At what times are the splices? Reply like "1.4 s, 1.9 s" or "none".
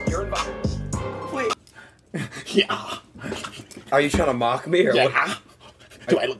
1.6 s